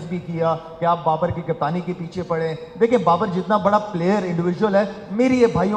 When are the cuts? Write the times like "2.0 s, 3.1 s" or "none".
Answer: none